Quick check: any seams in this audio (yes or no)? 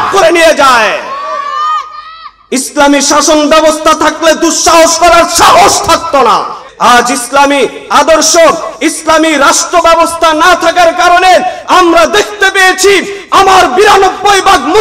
yes